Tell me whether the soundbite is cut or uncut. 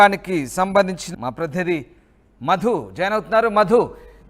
cut